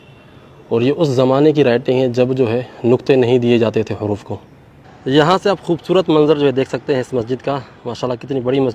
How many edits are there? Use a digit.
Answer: 1